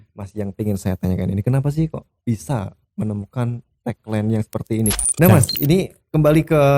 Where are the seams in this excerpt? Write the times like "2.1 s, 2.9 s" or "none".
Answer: 5.0 s